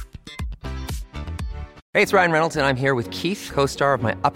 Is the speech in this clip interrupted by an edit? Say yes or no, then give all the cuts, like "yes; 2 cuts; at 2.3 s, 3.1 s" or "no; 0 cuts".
yes; 1 cut; at 1.8 s